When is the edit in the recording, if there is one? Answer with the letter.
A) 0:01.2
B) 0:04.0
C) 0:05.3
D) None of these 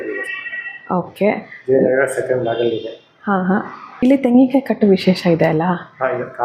B